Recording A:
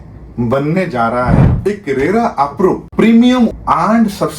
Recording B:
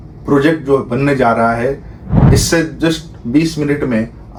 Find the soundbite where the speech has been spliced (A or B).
A